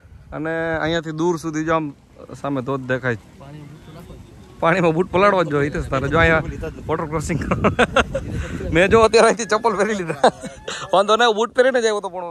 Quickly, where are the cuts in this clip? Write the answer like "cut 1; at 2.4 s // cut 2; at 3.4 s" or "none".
none